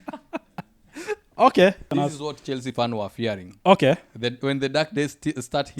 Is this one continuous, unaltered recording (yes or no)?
no